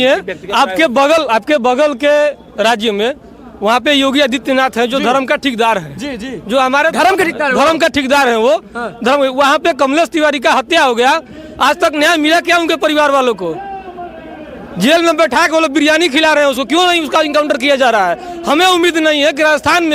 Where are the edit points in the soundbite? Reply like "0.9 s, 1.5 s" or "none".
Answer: none